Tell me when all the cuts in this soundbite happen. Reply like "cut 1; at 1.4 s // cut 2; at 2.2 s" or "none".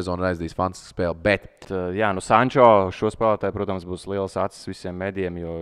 cut 1; at 1.7 s